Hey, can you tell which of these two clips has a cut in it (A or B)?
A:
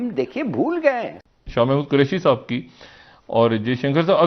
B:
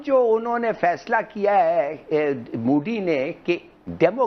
A